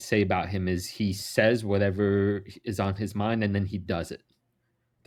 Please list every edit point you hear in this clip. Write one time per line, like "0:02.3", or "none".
none